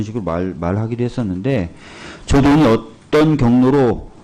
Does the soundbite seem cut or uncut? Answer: cut